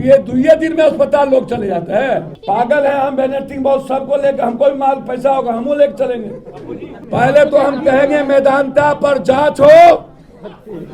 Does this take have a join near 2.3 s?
yes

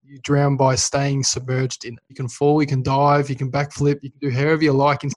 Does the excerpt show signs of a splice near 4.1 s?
no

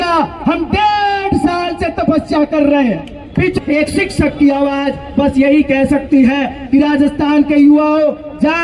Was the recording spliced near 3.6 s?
yes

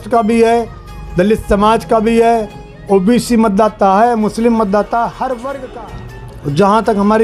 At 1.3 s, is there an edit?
no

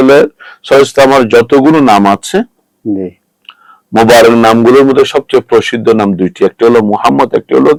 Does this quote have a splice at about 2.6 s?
no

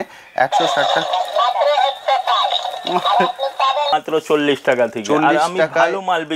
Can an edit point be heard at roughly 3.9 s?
yes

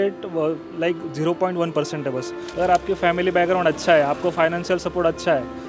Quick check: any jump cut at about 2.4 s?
yes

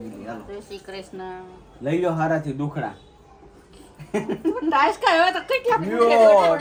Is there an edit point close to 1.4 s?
no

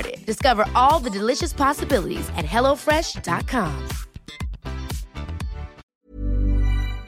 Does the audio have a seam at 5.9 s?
yes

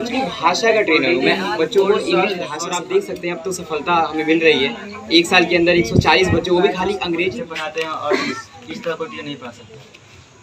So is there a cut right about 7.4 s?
yes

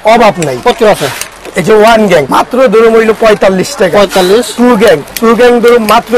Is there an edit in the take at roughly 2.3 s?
yes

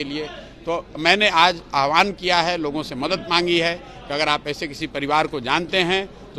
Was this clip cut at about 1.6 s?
no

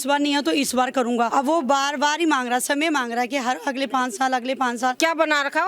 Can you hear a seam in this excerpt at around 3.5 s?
no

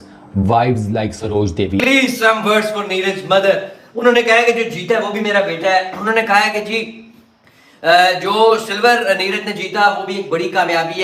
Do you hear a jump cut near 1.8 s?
yes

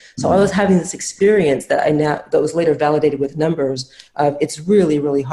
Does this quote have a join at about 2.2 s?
no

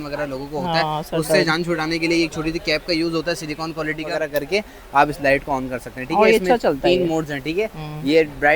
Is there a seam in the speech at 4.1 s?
yes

